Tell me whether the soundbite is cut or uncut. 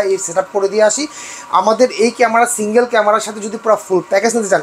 uncut